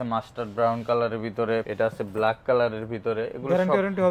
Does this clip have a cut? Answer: no; 0 cuts

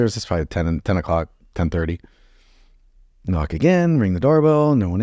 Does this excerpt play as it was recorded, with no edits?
yes; 0 cuts

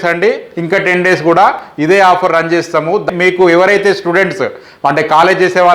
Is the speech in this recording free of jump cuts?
no; 1 cut; at 3.0 s

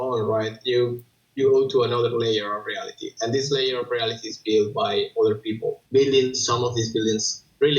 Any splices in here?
yes; 1 cut; at 5.8 s

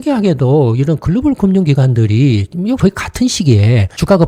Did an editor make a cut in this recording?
no; 0 cuts

